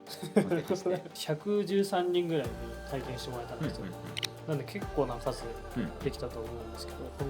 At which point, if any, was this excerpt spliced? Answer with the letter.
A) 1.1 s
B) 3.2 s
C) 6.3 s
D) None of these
A